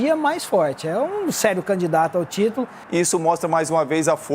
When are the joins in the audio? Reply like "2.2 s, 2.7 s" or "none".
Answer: 2.7 s